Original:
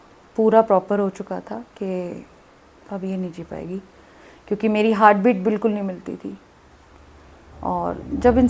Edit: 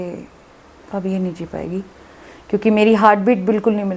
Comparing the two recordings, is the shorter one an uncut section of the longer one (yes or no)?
yes